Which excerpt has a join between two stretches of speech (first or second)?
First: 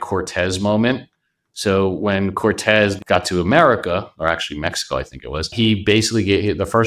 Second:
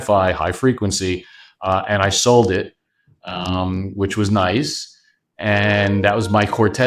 first